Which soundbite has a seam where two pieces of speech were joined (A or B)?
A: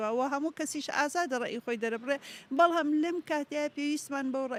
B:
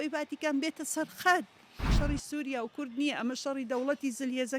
B